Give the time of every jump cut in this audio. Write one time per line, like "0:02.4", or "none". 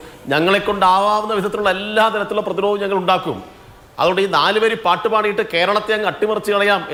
none